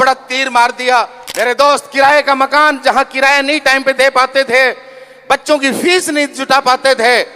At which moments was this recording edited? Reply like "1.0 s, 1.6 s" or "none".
1.2 s